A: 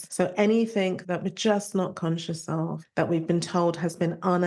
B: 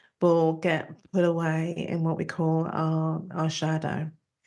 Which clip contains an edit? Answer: A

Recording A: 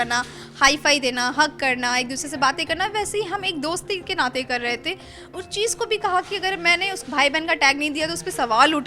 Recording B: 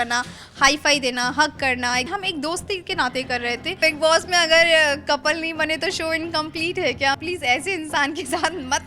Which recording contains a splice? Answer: B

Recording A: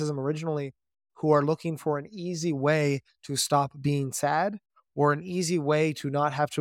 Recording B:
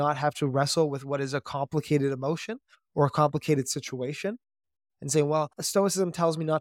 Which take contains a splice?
B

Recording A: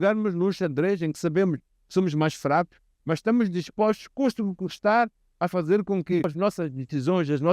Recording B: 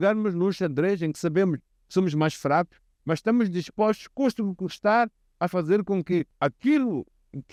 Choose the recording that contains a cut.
A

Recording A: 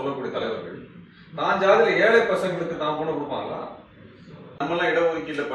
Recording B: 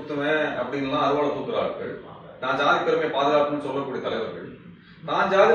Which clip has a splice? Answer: A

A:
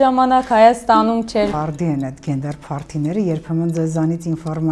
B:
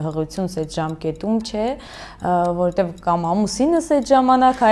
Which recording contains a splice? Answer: A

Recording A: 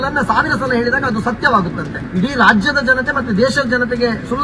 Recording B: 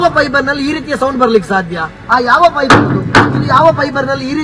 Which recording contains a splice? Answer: A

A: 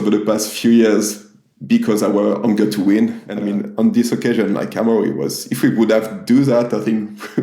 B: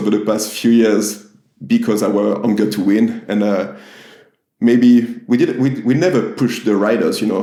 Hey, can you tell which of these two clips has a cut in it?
A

